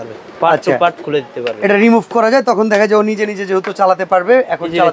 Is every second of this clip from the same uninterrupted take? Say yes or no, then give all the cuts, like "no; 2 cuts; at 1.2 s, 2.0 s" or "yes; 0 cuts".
yes; 0 cuts